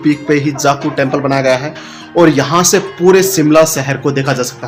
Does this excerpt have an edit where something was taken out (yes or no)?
no